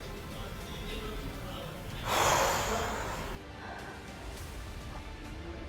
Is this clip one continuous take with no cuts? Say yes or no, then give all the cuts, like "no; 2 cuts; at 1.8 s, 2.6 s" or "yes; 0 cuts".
yes; 0 cuts